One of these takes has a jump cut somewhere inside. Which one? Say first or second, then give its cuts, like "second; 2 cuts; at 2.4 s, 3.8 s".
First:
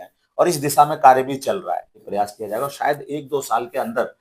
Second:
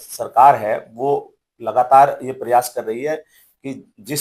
first; 1 cut; at 2.0 s